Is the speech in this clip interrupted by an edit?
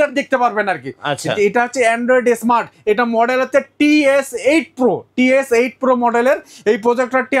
no; 0 cuts

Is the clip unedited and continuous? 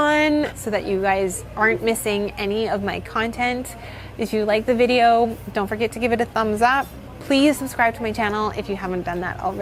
yes; 0 cuts

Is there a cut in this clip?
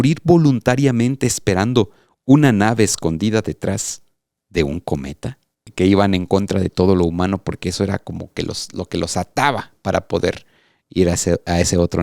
yes; 1 cut; at 5.7 s

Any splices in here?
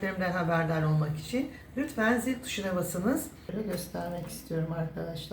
yes; 1 cut; at 3.5 s

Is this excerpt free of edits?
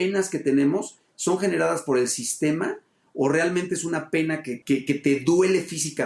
yes; 0 cuts

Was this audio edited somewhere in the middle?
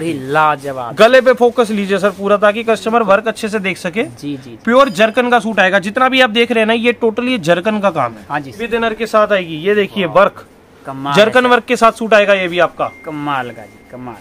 yes; 1 cut; at 8.6 s

